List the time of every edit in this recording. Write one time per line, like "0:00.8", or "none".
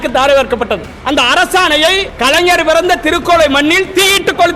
0:00.9
0:02.1